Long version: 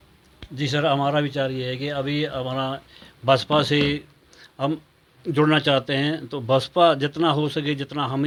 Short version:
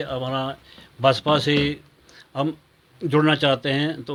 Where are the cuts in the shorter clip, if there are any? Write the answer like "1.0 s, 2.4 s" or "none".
none